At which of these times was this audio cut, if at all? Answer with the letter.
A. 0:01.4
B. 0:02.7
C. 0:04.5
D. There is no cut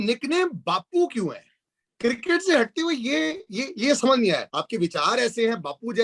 C